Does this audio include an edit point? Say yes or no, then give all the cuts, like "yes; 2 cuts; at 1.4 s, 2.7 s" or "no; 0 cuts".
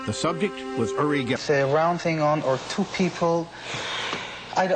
no; 0 cuts